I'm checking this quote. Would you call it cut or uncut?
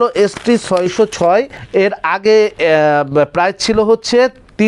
cut